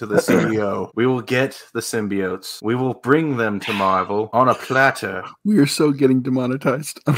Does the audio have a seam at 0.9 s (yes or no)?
yes